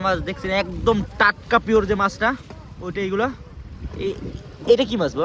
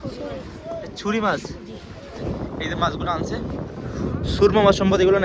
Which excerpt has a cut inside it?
second; 1 cut; at 2.2 s

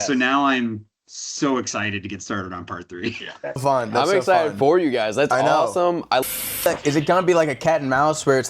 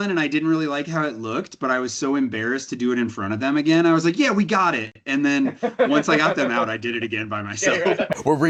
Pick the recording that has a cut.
first; 1 cut; at 6.2 s

